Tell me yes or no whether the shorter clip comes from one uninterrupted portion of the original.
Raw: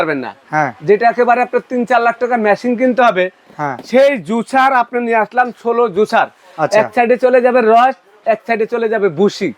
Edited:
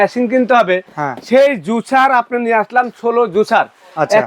no